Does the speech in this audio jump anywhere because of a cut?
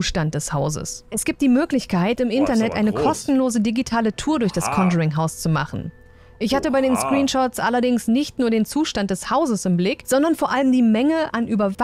no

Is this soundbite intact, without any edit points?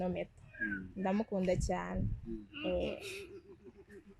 yes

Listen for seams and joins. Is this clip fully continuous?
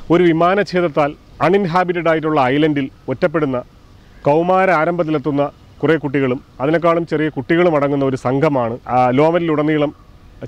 no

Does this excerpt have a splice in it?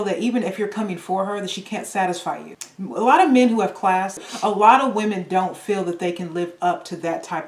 yes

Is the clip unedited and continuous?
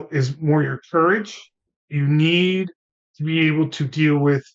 yes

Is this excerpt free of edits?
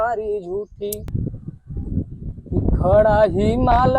no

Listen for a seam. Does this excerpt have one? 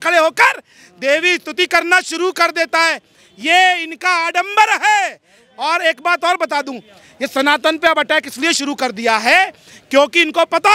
no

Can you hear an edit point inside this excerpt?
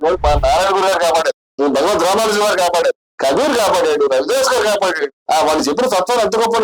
yes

